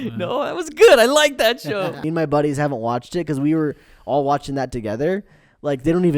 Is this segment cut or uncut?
cut